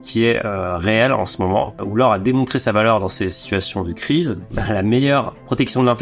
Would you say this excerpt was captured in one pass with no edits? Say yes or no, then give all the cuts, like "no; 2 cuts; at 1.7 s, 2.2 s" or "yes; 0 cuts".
no; 2 cuts; at 1.8 s, 4.5 s